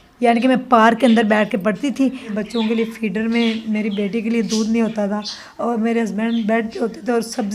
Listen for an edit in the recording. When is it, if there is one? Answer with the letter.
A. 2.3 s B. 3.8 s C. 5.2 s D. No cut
A